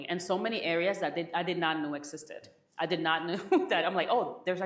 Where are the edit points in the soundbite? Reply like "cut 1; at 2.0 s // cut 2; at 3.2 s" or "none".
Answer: none